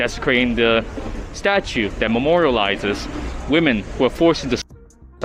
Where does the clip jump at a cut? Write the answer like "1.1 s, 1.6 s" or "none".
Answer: none